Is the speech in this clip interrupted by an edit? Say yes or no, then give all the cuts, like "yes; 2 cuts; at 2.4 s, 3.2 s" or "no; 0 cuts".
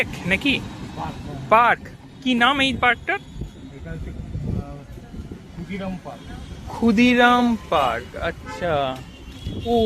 no; 0 cuts